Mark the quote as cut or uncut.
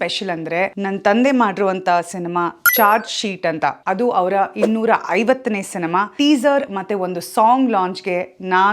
cut